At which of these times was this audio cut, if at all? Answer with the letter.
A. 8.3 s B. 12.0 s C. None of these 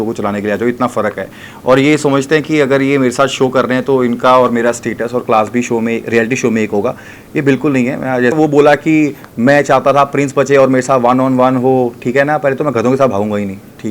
A